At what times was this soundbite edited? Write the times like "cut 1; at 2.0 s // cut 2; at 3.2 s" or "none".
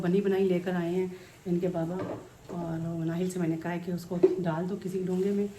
none